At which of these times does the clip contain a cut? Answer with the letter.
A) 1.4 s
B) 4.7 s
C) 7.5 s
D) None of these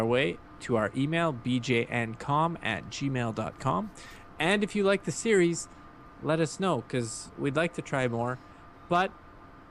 B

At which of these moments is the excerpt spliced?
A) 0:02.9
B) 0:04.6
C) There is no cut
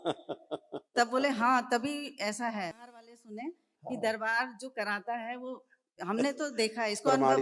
A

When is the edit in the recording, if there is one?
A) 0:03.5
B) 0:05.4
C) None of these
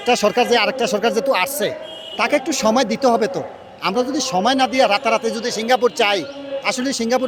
C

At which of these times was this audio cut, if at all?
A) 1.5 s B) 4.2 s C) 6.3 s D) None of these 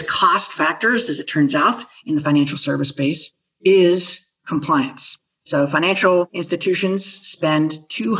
D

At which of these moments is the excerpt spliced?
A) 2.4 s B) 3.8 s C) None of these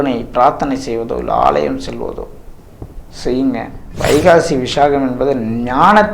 B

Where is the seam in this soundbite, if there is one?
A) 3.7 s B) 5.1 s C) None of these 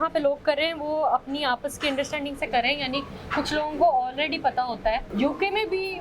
B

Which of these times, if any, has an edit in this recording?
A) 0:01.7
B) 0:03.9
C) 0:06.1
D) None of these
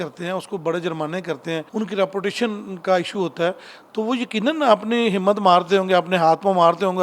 A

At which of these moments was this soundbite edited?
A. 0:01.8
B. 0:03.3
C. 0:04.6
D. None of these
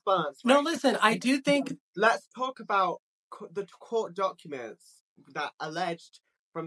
A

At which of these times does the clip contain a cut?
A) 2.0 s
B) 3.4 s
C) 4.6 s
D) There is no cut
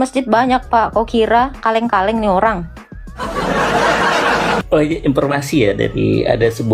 C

